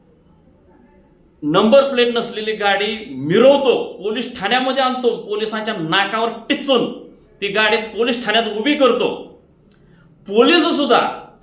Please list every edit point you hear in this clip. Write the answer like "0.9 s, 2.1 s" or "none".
none